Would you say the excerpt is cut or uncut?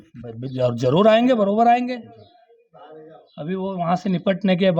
uncut